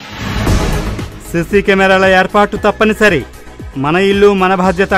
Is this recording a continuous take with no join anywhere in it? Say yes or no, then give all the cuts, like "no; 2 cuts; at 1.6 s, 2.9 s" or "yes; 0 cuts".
no; 1 cut; at 1.1 s